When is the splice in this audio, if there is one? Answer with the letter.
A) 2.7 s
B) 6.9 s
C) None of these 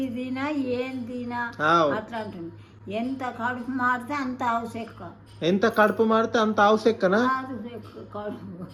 C